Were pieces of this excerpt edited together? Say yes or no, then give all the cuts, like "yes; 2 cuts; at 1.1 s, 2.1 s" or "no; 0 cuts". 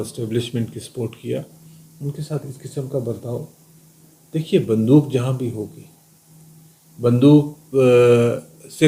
no; 0 cuts